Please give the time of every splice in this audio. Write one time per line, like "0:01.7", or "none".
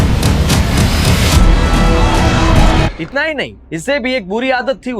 0:02.9